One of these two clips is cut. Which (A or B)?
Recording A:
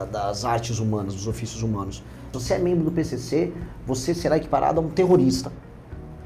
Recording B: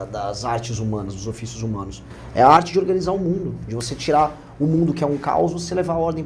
A